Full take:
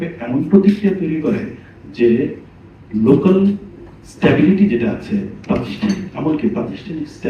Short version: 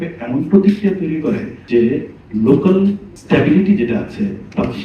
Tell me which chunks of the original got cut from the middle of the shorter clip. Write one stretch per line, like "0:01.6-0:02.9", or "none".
0:01.5-0:01.8
0:02.4-0:02.8
0:03.7-0:04.0